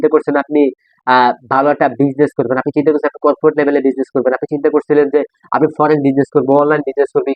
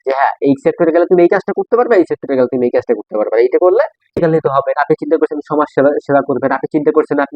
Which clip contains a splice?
second; 1 cut; at 4.1 s

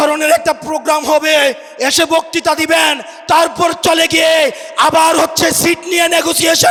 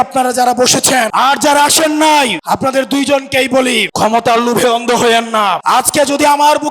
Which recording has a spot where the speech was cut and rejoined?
second; 4 cuts; at 1.1 s, 2.4 s, 3.9 s, 5.6 s

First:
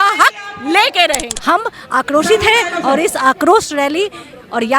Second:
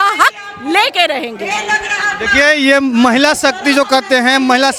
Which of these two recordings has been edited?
first; 1 cut; at 1.3 s

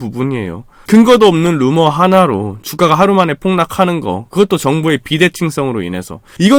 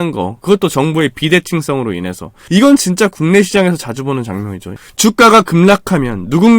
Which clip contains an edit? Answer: second; 1 cut; at 4.7 s

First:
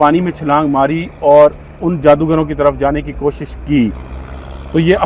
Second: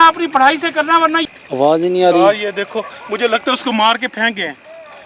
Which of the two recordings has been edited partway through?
second; 1 cut; at 1.2 s

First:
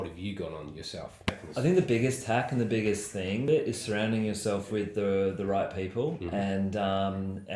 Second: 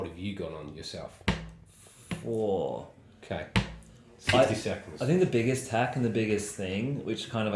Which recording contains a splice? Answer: first; 2 cuts; at 1.4 s, 3.5 s

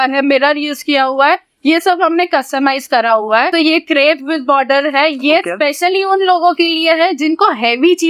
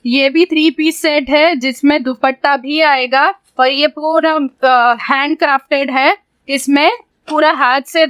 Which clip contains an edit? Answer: first; 1 cut; at 3.5 s

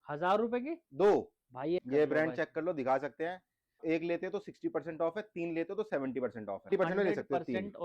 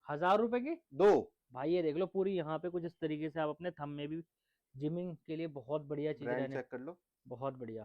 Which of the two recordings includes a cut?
first; 3 cuts; at 1.8 s, 3.8 s, 6.7 s

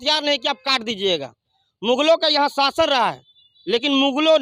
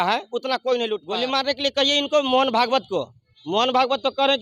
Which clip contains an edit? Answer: second; 1 cut; at 1.1 s

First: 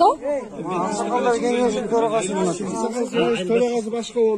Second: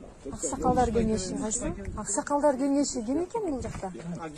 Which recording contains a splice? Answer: second; 1 cut; at 0.9 s

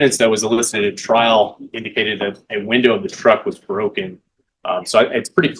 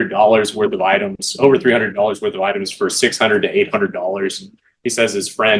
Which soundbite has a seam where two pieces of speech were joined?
second; 1 cut; at 3.1 s

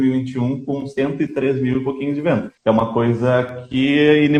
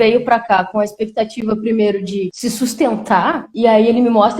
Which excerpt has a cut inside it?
second; 1 cut; at 3.4 s

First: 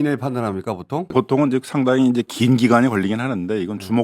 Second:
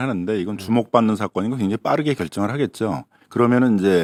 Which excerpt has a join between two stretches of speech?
first; 1 cut; at 1.1 s

